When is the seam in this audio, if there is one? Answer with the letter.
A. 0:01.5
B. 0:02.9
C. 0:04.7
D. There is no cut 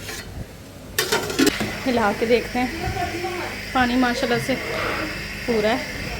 A